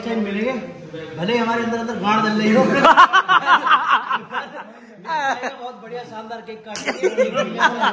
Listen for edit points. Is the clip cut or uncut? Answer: uncut